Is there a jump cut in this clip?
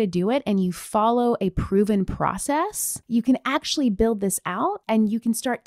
yes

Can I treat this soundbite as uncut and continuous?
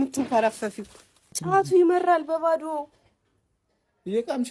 no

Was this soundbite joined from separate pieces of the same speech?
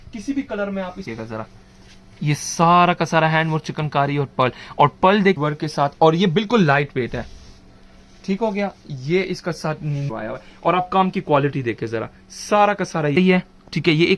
yes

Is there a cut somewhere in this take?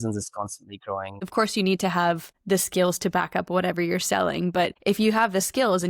yes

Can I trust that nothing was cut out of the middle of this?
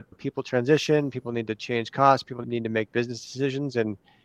no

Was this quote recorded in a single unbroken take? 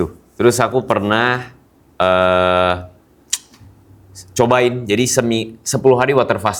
yes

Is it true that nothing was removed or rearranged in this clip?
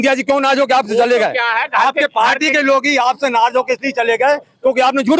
yes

